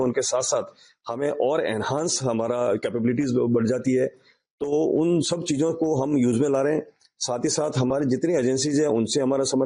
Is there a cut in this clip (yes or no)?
no